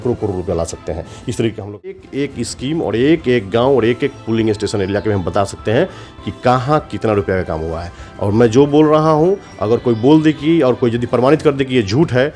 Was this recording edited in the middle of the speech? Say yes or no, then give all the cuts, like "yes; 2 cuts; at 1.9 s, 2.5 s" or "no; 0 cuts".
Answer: yes; 1 cut; at 2.0 s